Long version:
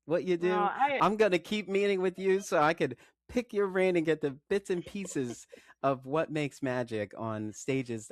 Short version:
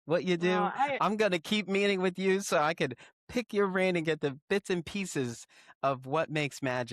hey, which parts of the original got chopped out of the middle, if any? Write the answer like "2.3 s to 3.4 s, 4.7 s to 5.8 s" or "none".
none